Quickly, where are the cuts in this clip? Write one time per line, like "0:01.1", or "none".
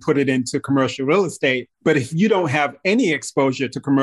0:01.7